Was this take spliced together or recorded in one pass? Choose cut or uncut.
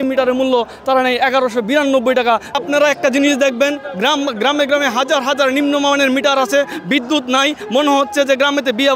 uncut